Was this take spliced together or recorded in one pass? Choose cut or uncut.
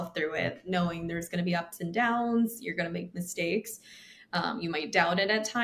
uncut